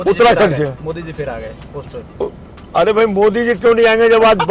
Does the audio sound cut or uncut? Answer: uncut